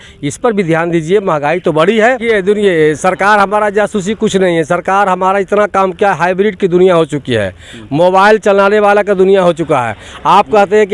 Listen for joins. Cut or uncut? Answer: cut